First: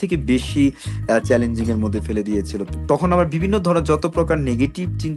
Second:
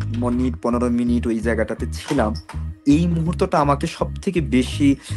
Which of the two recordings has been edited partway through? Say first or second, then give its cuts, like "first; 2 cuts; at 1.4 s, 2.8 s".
first; 1 cut; at 2.7 s